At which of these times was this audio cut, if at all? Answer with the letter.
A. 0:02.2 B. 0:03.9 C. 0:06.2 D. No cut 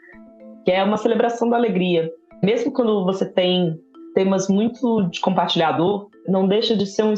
C